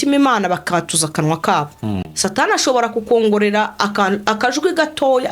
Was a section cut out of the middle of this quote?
yes; 1 cut; at 2.1 s

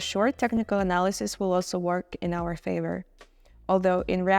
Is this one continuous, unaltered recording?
yes; 0 cuts

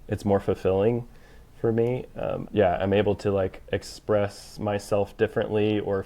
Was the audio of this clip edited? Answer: yes; 1 cut; at 2.4 s

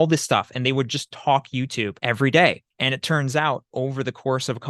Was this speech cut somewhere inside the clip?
yes; 2 cuts; at 2.0 s, 2.7 s

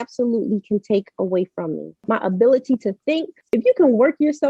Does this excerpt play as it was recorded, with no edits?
no; 2 cuts; at 2.0 s, 3.5 s

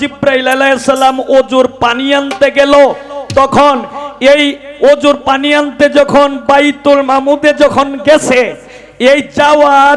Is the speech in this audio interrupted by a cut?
no; 0 cuts

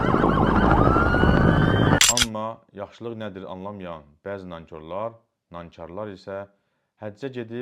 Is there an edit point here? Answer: yes; 1 cut; at 2.0 s

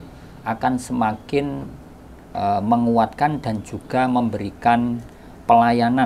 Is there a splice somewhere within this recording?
no; 0 cuts

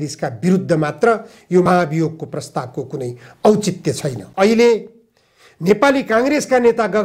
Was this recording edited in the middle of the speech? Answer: yes; 1 cut; at 4.2 s

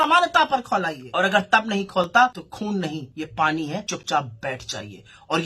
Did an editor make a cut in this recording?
yes; 3 cuts; at 1.0 s, 2.8 s, 3.9 s

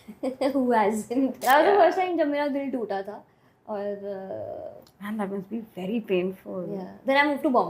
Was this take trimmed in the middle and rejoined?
yes; 1 cut; at 1.4 s

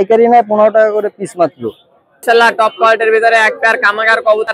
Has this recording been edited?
yes; 1 cut; at 2.2 s

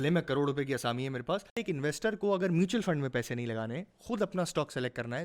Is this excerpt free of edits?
no; 1 cut; at 1.6 s

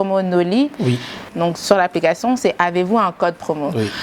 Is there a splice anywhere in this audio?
yes; 1 cut; at 1.2 s

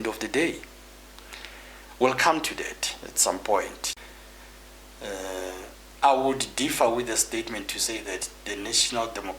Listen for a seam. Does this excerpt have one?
yes; 1 cut; at 3.9 s

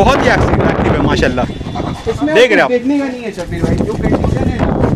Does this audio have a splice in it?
no; 0 cuts

